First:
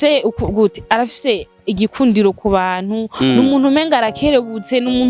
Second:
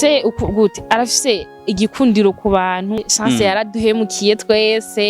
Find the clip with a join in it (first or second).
second